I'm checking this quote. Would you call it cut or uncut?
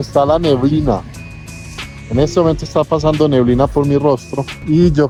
uncut